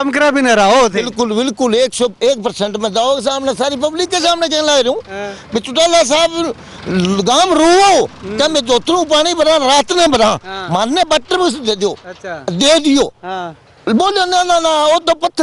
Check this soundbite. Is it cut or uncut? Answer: uncut